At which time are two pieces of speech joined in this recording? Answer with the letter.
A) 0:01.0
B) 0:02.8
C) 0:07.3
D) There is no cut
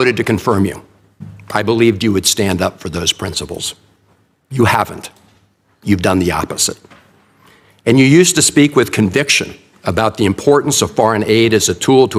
D